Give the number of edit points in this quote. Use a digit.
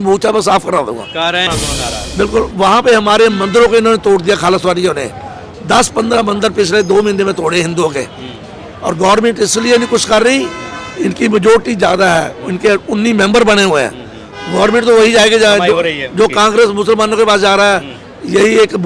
1